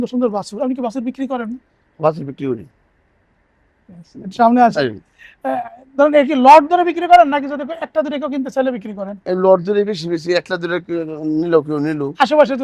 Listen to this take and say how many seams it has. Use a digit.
0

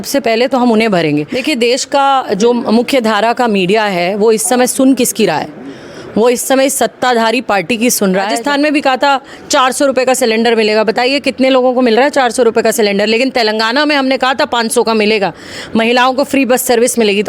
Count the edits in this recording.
2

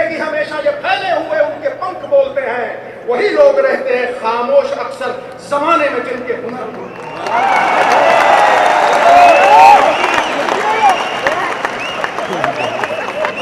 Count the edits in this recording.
0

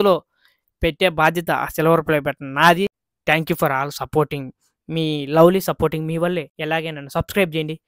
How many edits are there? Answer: 2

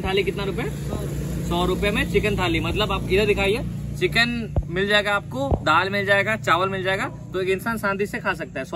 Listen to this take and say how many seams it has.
0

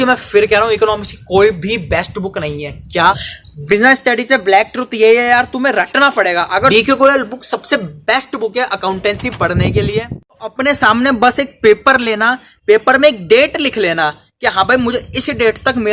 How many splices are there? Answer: 3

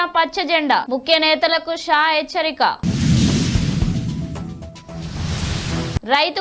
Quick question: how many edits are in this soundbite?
0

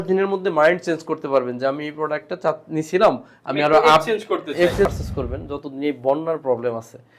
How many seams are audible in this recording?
1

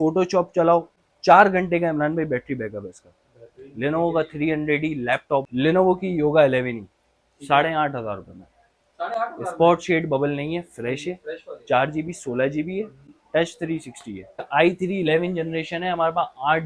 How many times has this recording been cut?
3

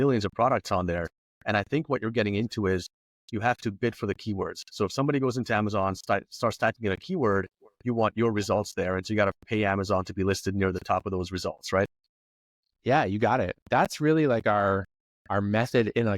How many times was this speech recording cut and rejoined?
1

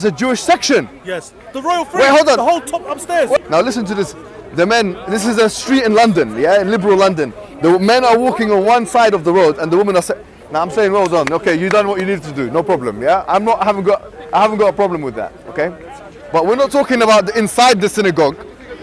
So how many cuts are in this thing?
1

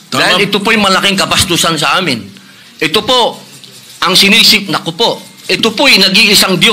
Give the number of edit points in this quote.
0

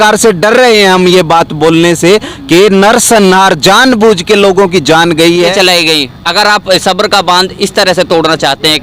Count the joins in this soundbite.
1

